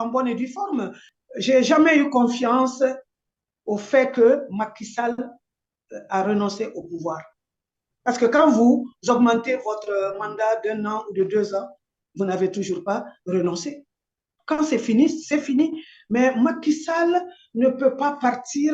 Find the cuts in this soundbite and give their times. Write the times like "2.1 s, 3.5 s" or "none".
1.1 s